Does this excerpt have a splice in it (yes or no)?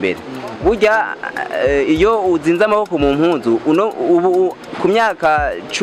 no